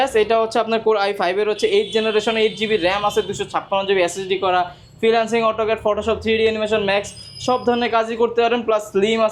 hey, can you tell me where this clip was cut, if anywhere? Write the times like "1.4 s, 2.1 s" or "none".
none